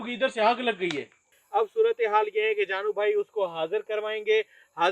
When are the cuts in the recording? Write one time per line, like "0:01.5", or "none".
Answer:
0:01.3